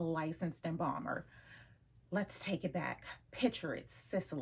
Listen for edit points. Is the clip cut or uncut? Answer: uncut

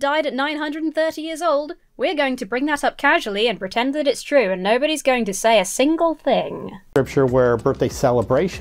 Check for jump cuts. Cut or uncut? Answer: uncut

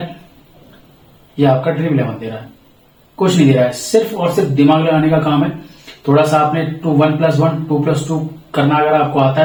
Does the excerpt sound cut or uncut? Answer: uncut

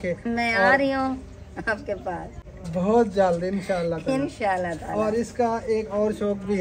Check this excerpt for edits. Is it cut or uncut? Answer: uncut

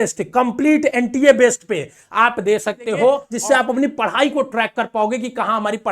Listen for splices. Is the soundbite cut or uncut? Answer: cut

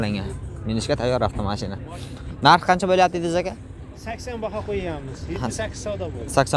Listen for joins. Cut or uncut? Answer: uncut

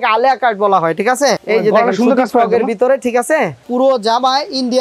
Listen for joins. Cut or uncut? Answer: cut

